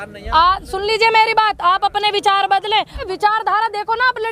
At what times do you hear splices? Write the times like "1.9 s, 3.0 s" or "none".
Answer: 3.0 s